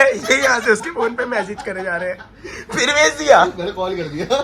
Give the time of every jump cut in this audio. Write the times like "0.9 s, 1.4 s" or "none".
none